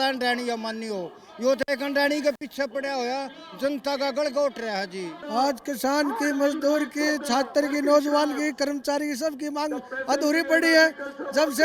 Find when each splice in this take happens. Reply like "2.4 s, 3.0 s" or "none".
5.1 s